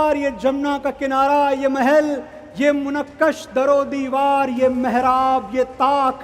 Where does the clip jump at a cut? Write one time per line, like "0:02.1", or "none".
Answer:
none